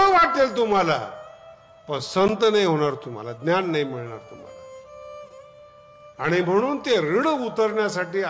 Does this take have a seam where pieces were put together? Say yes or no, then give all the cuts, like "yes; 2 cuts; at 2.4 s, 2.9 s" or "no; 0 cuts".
no; 0 cuts